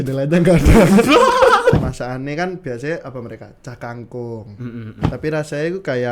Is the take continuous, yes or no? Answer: no